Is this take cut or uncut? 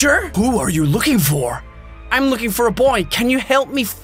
uncut